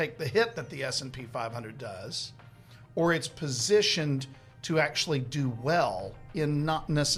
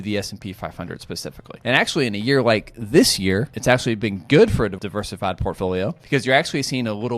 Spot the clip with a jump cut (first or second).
second